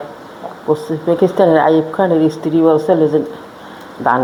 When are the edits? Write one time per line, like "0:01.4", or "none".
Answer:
none